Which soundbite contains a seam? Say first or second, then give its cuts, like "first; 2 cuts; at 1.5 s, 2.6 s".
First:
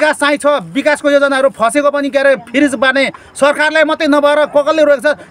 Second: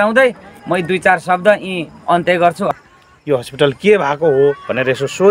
second; 1 cut; at 2.8 s